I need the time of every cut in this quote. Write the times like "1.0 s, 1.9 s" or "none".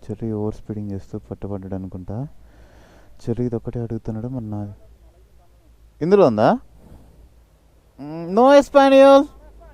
none